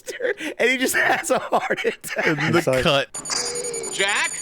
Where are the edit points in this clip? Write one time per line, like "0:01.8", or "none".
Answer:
0:03.1